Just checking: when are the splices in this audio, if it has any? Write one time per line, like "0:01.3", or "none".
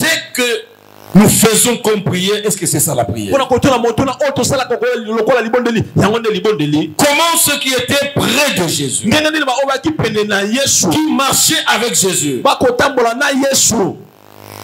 none